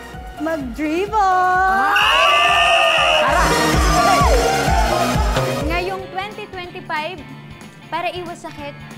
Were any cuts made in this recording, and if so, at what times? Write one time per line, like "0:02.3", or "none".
0:05.6